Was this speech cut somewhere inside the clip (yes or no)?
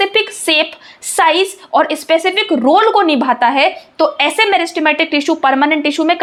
no